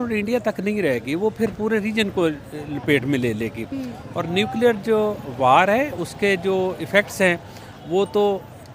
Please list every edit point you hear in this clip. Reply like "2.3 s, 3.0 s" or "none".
none